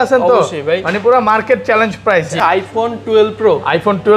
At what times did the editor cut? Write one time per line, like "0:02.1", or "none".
0:02.3